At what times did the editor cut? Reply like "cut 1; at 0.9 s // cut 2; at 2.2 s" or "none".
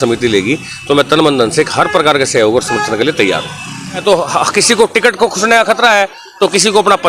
cut 1; at 4.0 s